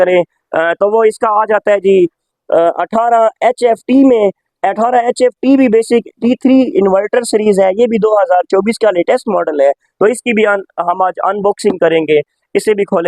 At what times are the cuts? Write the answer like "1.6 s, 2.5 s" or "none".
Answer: none

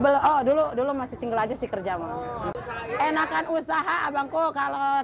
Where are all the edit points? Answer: 2.5 s

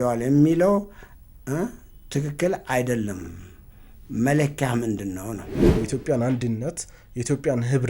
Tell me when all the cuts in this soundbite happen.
5.7 s

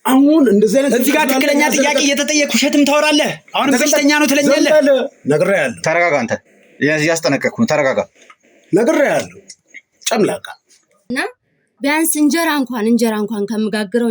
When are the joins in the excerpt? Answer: 11.0 s

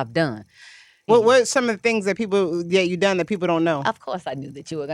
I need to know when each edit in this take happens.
1.1 s

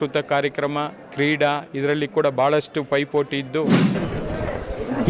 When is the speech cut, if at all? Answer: 3.6 s

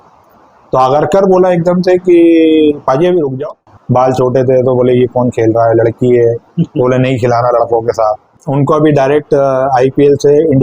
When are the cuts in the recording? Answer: 3.7 s, 8.4 s

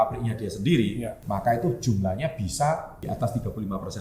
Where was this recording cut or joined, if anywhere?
1.1 s, 2.9 s

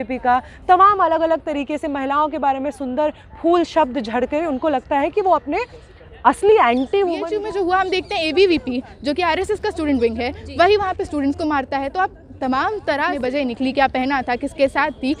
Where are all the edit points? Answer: 7.4 s, 13.2 s

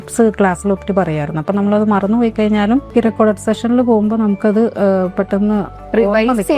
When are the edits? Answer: 2.9 s

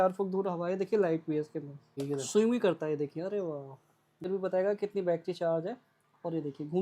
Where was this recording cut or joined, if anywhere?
1.9 s, 4.3 s

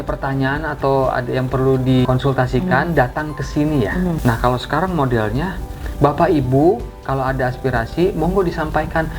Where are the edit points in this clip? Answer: 2.0 s, 4.2 s

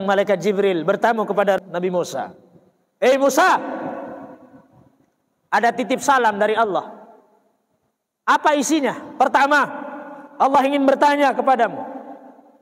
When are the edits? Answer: 1.6 s

